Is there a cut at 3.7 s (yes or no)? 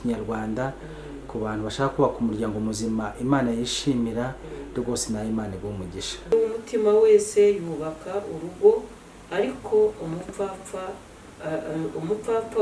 no